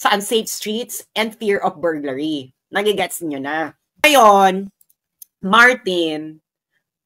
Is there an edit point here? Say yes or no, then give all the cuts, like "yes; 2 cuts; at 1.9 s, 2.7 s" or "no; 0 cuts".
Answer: yes; 1 cut; at 4.0 s